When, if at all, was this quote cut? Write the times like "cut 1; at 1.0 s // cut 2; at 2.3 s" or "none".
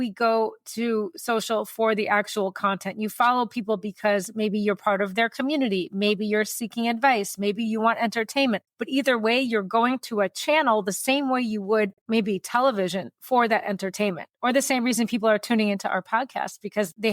cut 1; at 8.7 s

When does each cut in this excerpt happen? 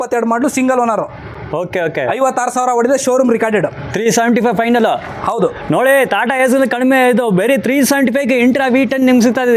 none

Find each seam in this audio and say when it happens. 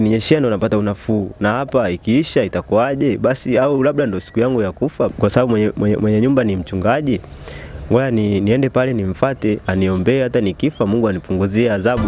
cut 1; at 5.1 s

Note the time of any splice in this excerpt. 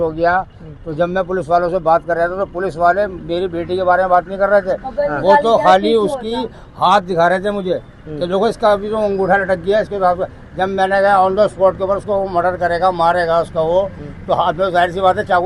none

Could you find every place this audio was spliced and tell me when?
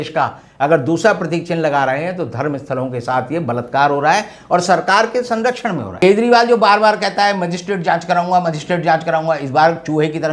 cut 1; at 5.9 s

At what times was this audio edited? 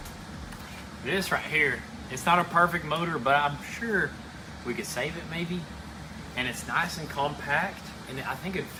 none

